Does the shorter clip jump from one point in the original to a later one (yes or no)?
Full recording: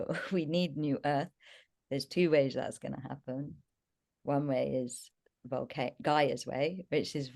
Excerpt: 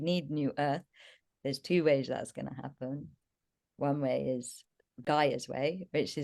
yes